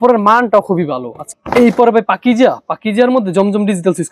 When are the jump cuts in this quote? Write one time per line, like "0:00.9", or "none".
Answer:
0:01.2